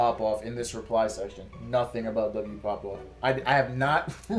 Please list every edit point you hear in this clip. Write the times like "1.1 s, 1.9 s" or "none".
none